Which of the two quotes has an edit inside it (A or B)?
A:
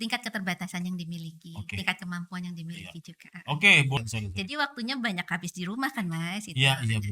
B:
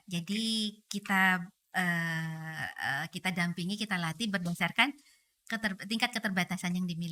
A